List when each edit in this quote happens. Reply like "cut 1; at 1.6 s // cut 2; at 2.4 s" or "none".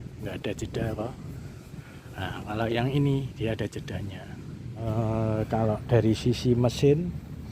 cut 1; at 4.8 s

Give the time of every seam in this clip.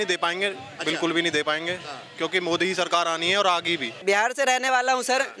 cut 1; at 4.0 s

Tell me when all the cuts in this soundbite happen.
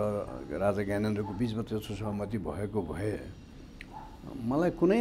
none

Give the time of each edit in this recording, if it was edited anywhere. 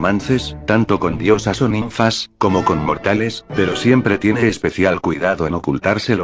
cut 1; at 2.8 s

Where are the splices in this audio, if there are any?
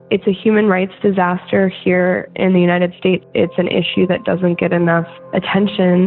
cut 1; at 3.2 s // cut 2; at 5.2 s

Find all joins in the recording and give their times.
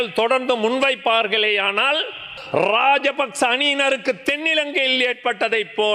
cut 1; at 2.3 s

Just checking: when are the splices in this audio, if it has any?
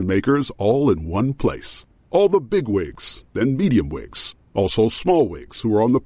none

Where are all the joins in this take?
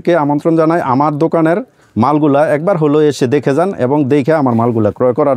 none

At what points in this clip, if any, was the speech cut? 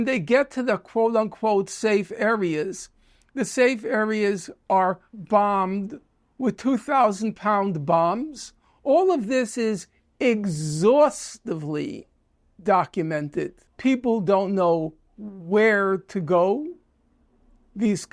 cut 1; at 13.6 s

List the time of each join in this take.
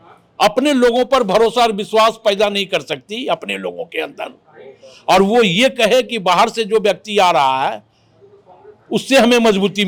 none

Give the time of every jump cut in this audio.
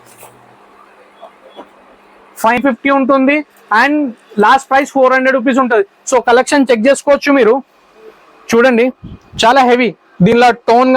cut 1; at 2.6 s

